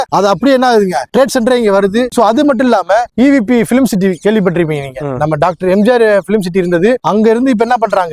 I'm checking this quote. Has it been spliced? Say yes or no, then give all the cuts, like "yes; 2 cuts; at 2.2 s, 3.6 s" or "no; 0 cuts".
no; 0 cuts